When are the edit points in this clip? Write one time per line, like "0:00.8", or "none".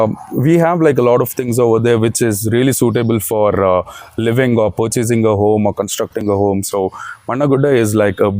none